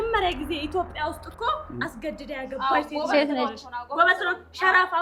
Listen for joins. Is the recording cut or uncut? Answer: uncut